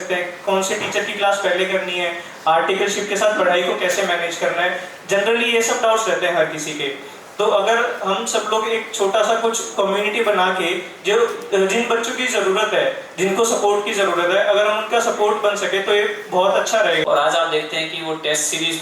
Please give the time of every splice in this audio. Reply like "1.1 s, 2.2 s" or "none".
17.0 s